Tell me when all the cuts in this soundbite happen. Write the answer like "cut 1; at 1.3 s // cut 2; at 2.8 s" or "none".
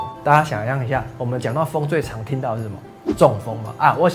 none